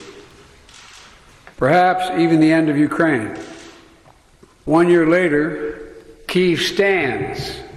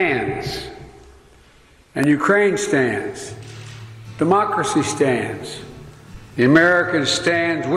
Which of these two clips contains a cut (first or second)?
first